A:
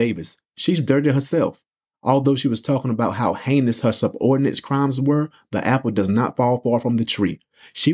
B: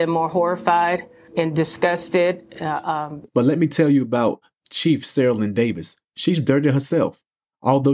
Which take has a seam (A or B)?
B